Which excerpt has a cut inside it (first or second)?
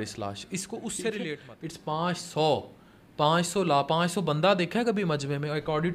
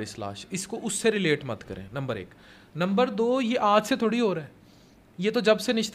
first